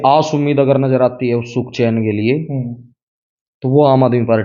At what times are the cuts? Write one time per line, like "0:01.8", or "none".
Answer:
none